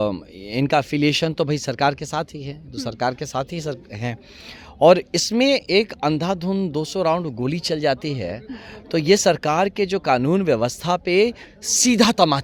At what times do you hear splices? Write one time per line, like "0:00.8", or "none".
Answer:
none